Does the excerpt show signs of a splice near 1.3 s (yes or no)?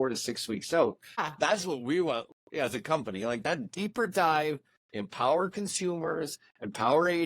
yes